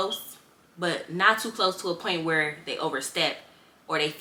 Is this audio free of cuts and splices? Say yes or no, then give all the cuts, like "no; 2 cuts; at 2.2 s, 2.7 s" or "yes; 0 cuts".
yes; 0 cuts